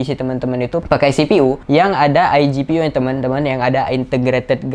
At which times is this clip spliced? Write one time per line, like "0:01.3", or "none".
0:00.8
0:01.6